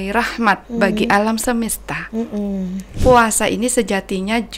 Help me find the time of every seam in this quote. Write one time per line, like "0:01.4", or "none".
0:02.9